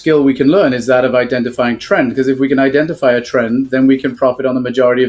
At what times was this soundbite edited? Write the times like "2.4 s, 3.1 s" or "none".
none